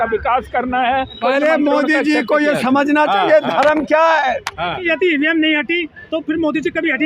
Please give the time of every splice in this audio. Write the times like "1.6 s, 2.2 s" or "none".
1.2 s, 4.9 s